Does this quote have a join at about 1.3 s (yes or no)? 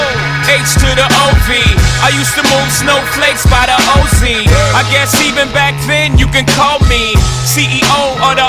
no